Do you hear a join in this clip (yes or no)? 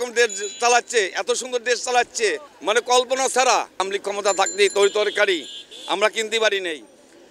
yes